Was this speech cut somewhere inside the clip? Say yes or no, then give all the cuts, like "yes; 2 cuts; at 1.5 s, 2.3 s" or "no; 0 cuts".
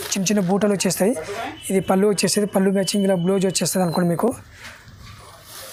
no; 0 cuts